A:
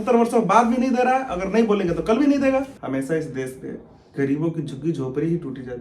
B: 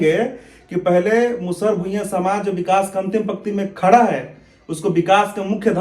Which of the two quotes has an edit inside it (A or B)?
A